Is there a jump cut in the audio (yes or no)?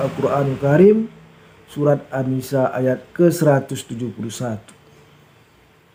no